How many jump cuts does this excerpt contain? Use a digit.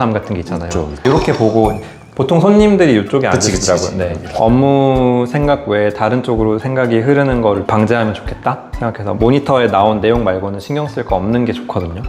2